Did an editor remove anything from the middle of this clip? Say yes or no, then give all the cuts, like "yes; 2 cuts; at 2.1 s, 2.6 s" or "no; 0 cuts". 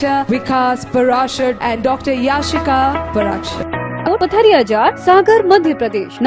yes; 1 cut; at 4.0 s